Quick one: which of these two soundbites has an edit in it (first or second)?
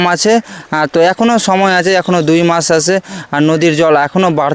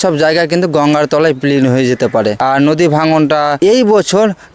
second